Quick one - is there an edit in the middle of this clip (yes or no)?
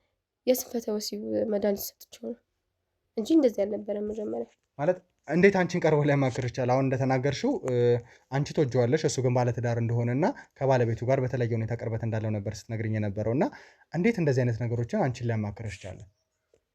no